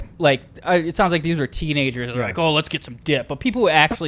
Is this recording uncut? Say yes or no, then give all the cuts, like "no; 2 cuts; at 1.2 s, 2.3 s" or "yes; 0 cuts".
yes; 0 cuts